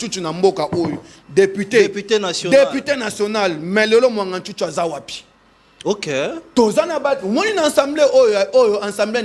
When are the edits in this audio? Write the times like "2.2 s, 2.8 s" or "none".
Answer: none